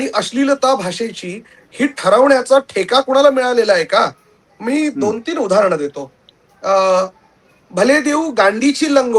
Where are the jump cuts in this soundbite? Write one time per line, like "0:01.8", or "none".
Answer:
none